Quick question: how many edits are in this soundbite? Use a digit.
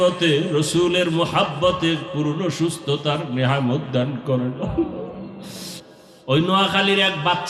1